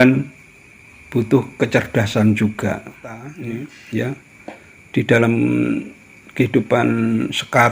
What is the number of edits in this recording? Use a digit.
1